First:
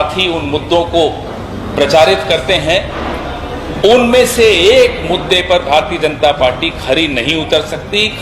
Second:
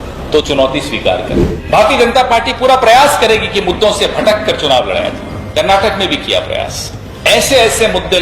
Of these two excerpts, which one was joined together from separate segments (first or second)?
second